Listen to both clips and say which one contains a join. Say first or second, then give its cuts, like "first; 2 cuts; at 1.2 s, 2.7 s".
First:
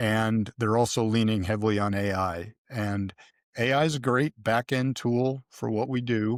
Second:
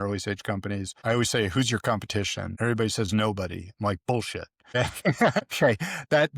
second; 4 cuts; at 0.9 s, 2.4 s, 4.7 s, 5.4 s